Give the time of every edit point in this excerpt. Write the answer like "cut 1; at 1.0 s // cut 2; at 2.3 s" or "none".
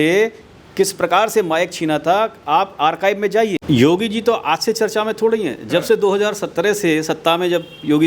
cut 1; at 3.6 s

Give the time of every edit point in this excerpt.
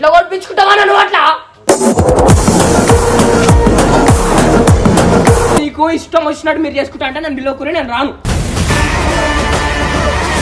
cut 1; at 5.6 s

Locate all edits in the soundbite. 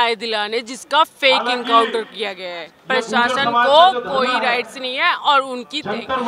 none

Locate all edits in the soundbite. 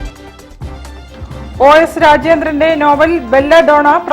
cut 1; at 1.0 s

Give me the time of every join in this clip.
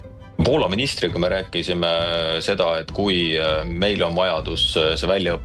none

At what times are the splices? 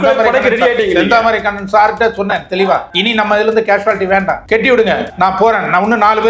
cut 1; at 2.9 s // cut 2; at 4.4 s // cut 3; at 5.1 s

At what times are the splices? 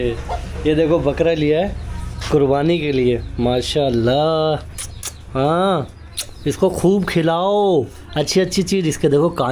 none

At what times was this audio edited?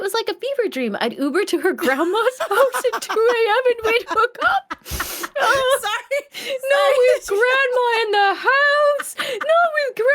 none

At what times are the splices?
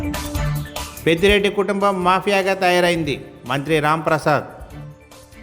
cut 1; at 0.9 s

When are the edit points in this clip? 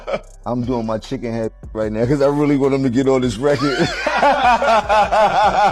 none

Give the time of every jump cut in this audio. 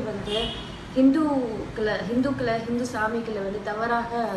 none

